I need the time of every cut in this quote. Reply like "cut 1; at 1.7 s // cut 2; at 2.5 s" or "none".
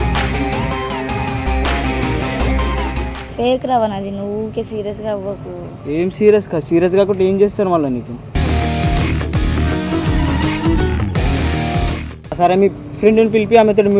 cut 1; at 3.2 s // cut 2; at 12.4 s